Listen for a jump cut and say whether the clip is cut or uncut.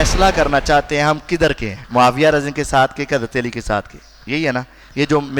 cut